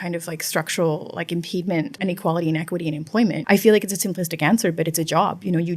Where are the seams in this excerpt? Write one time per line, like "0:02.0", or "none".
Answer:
0:01.9
0:03.4